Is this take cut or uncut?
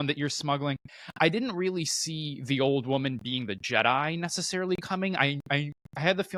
uncut